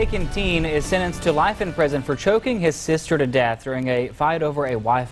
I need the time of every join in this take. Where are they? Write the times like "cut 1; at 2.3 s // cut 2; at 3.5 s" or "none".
none